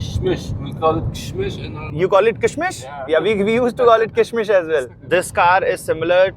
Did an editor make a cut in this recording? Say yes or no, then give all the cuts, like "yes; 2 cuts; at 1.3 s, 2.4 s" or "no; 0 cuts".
yes; 1 cut; at 4.9 s